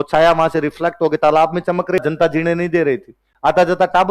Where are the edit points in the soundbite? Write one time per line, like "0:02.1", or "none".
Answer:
0:02.0